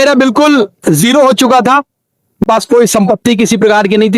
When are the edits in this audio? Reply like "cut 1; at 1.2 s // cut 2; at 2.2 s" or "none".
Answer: cut 1; at 2.4 s